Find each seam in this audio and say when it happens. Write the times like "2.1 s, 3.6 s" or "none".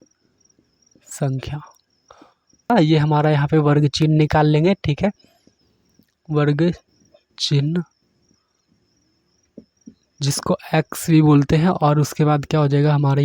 2.7 s